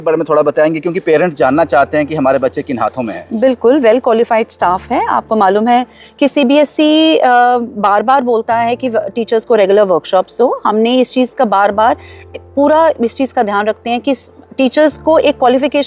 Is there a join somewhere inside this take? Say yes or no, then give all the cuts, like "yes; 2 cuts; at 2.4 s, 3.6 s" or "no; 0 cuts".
no; 0 cuts